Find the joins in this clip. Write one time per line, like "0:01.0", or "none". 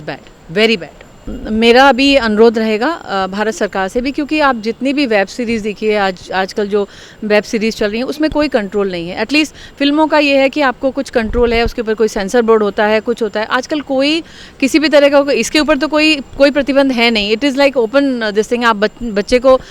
none